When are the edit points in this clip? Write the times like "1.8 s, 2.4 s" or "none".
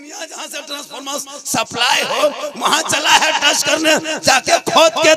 none